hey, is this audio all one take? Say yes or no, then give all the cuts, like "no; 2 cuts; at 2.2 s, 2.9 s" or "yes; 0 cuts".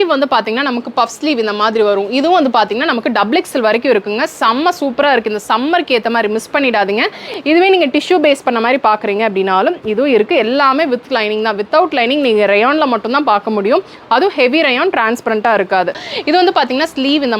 no; 2 cuts; at 7.2 s, 16.0 s